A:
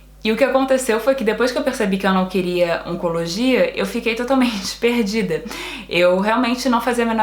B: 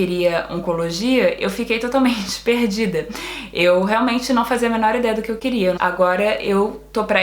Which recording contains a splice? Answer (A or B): B